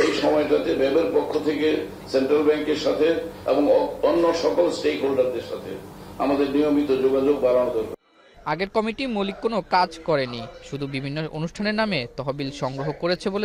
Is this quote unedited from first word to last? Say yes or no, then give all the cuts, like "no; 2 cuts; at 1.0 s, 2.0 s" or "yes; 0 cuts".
yes; 0 cuts